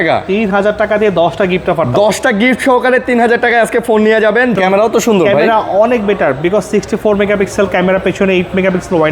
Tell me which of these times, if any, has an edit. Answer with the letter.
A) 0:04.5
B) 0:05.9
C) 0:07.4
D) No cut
A